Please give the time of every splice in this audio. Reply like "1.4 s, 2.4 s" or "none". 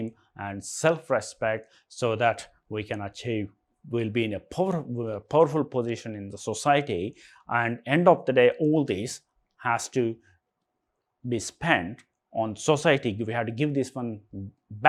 none